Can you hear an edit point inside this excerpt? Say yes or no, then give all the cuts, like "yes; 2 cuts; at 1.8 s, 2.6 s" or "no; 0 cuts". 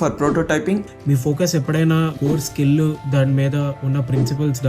yes; 3 cuts; at 0.8 s, 2.1 s, 3.0 s